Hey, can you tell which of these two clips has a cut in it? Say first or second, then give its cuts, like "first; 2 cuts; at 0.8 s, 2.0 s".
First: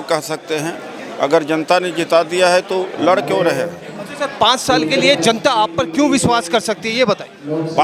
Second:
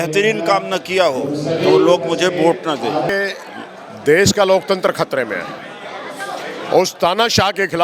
second; 1 cut; at 3.1 s